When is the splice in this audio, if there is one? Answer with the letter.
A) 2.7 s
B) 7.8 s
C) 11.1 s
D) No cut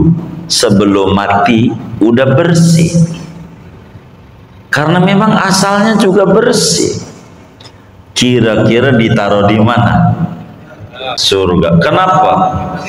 C